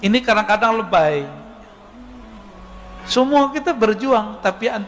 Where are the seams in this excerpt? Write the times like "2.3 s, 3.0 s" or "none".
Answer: none